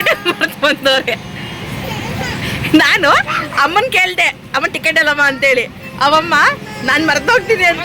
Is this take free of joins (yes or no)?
yes